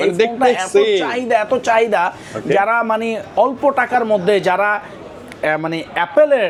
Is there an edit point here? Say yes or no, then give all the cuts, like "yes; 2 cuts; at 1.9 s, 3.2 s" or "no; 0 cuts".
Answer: no; 0 cuts